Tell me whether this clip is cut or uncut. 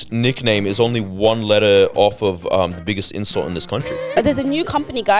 cut